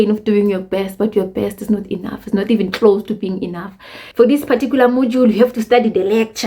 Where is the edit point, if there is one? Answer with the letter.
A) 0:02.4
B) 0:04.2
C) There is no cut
B